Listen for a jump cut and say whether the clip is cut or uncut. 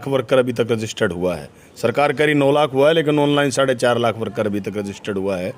uncut